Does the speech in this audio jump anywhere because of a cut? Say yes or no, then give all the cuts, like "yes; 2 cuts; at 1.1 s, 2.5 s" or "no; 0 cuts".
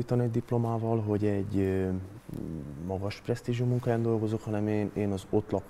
no; 0 cuts